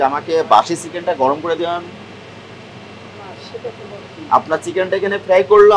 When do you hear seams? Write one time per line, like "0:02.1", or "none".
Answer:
none

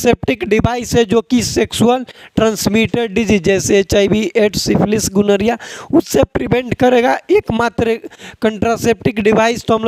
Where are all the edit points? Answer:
none

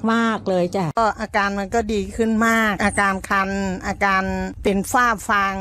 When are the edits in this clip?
0:01.0
0:02.8
0:04.7

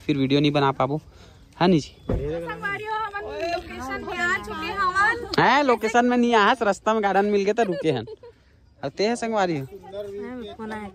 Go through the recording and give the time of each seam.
0:02.7

